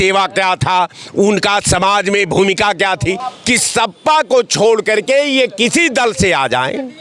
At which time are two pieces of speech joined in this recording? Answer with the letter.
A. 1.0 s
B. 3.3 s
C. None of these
B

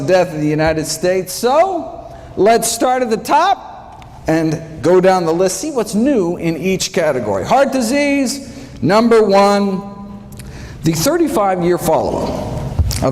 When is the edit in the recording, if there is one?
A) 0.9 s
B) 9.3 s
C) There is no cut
B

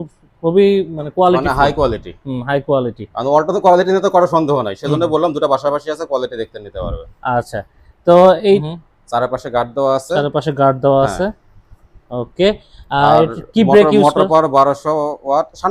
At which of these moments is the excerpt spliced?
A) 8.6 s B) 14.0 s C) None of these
A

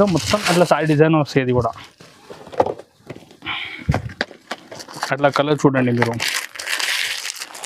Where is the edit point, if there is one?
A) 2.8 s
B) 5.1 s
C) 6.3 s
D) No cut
D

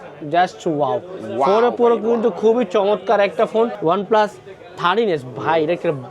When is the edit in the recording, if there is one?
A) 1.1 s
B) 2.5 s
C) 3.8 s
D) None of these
C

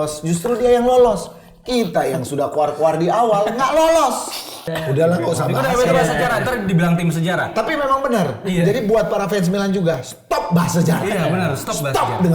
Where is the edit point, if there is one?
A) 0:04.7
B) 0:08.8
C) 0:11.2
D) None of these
A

